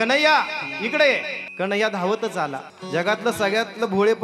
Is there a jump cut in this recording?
yes; 2 cuts; at 1.4 s, 2.7 s

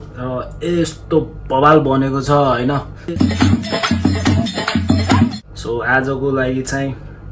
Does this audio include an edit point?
yes; 2 cuts; at 3.0 s, 5.4 s

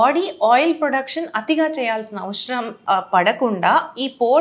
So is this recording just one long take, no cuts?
yes; 0 cuts

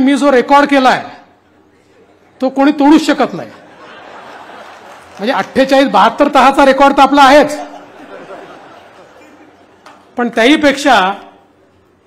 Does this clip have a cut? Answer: no; 0 cuts

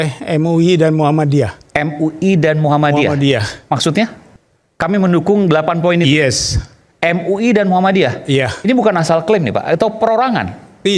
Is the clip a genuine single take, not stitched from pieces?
yes; 0 cuts

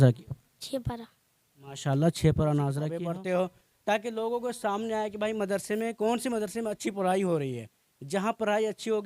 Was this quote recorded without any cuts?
no; 1 cut; at 2.8 s

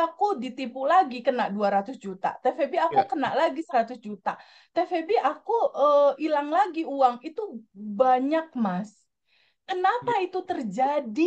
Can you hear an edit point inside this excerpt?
no; 0 cuts

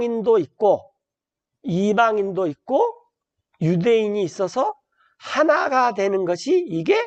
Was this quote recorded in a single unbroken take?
yes; 0 cuts

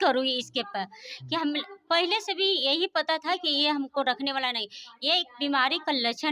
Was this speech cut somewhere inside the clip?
no; 0 cuts

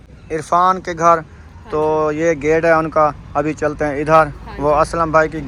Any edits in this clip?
no; 0 cuts

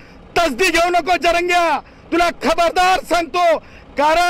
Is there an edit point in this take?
no; 0 cuts

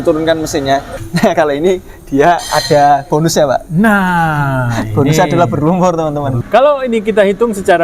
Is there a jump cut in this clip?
yes; 2 cuts; at 0.9 s, 6.4 s

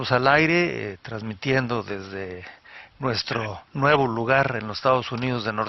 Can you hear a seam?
yes; 1 cut; at 2.8 s

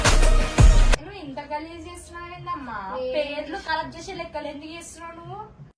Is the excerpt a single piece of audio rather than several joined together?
no; 1 cut; at 1.0 s

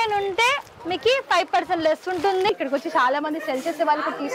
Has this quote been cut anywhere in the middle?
yes; 1 cut; at 2.5 s

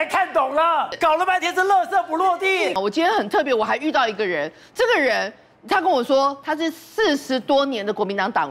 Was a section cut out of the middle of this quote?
yes; 2 cuts; at 0.9 s, 2.7 s

